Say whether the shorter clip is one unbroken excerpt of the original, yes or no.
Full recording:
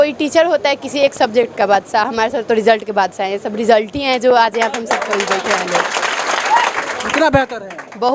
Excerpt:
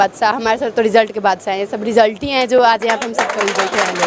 yes